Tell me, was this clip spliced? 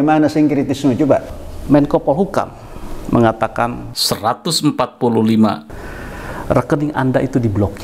yes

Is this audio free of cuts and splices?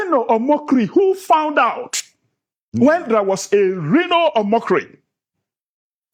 yes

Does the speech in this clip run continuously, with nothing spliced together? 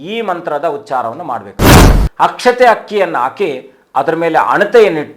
no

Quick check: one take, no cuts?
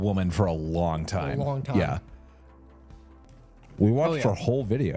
no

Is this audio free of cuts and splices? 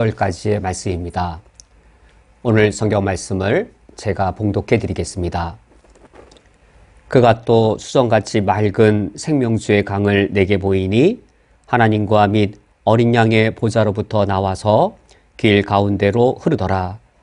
yes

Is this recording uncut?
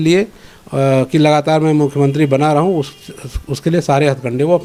yes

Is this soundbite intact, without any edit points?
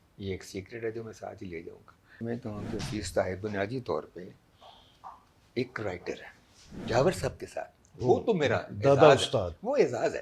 no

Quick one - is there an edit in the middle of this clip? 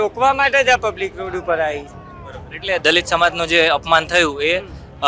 no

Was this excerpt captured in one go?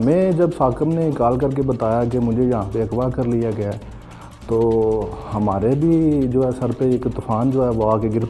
yes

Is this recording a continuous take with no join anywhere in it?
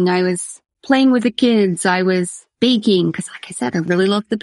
no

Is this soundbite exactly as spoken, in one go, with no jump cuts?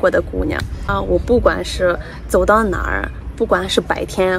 no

